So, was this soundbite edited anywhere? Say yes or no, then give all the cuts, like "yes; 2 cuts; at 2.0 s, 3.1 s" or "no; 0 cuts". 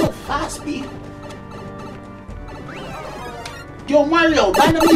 no; 0 cuts